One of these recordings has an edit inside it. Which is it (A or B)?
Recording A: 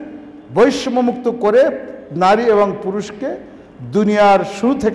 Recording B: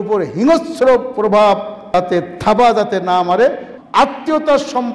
B